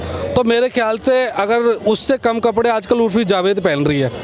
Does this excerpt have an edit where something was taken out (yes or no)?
no